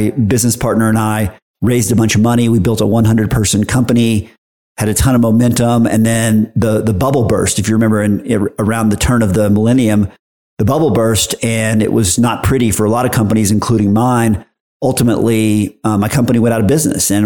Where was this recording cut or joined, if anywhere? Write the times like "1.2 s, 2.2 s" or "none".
none